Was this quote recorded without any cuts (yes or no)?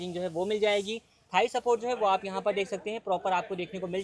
yes